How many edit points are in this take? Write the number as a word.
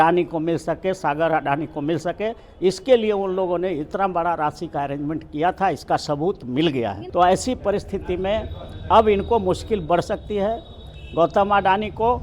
one